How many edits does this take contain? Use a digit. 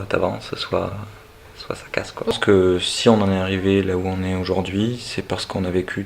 1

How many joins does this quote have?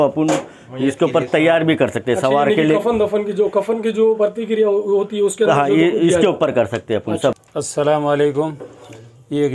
1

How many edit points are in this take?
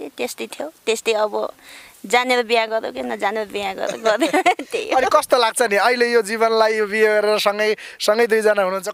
0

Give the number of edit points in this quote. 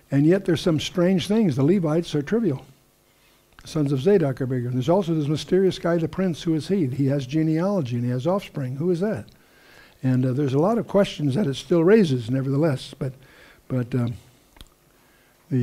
1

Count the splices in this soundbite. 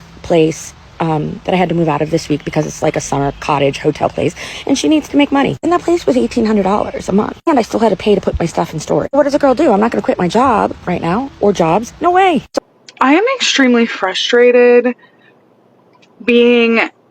1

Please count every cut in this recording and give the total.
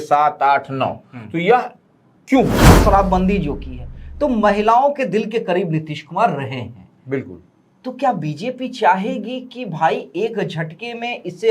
1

